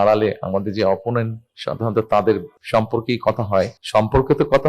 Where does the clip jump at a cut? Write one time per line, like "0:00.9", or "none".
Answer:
0:02.5
0:03.8